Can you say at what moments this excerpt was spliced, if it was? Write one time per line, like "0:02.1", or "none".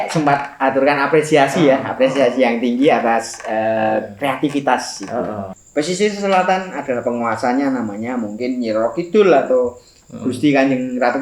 0:05.5